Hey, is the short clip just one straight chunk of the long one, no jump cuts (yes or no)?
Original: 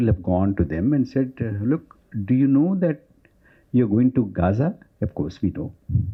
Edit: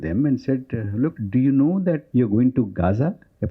no